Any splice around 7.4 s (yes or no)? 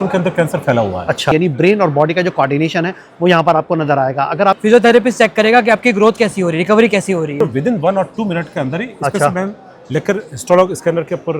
yes